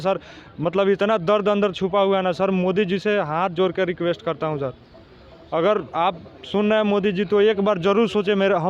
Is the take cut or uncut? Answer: uncut